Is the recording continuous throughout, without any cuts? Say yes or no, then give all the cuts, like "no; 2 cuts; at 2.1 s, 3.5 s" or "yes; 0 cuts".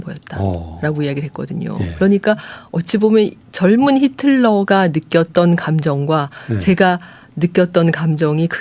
yes; 0 cuts